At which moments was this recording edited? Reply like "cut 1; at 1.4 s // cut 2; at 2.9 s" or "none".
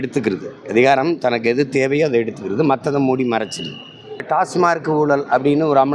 cut 1; at 4.2 s